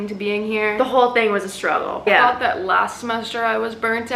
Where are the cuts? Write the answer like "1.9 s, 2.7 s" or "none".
2.0 s